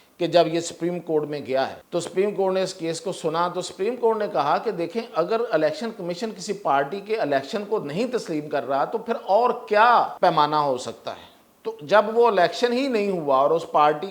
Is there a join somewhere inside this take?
yes; 2 cuts; at 1.8 s, 10.1 s

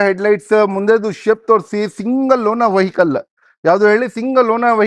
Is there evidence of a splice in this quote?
no; 0 cuts

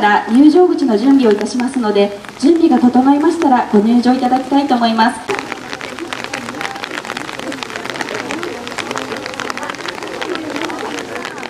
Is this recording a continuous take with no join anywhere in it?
no; 1 cut; at 1.8 s

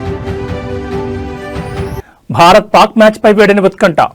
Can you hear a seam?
yes; 1 cut; at 1.5 s

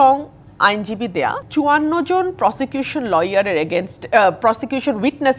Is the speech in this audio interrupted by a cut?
yes; 1 cut; at 1.4 s

